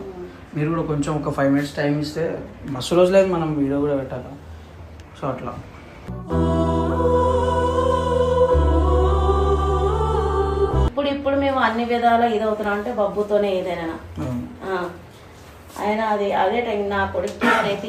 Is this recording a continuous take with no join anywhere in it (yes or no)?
no